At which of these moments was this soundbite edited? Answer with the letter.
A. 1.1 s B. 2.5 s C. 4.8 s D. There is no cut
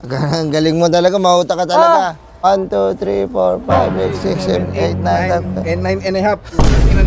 B